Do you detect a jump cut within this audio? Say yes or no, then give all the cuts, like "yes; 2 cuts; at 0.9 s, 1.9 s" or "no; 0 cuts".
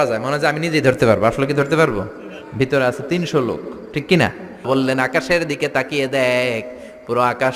yes; 1 cut; at 4.7 s